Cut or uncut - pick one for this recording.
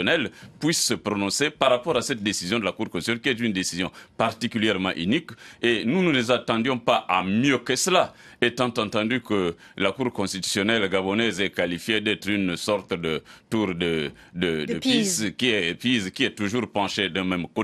uncut